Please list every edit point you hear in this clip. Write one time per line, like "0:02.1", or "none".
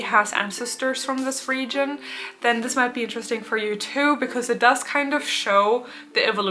none